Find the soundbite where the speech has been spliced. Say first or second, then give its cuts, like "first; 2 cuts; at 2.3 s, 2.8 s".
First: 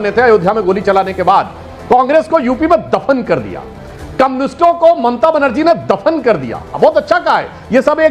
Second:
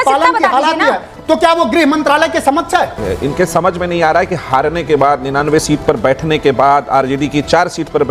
second; 1 cut; at 3.0 s